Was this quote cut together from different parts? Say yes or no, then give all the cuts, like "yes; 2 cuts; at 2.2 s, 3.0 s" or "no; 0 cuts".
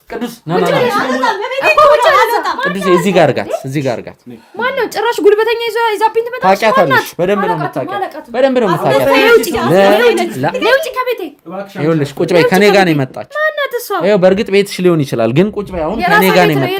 no; 0 cuts